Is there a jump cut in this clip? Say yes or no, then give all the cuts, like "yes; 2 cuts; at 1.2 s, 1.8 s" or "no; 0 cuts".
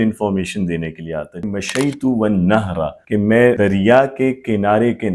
yes; 2 cuts; at 1.4 s, 3.3 s